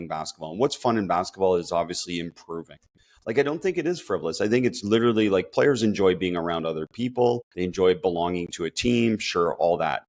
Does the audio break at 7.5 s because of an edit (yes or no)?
yes